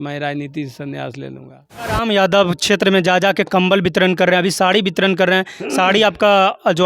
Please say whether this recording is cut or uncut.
cut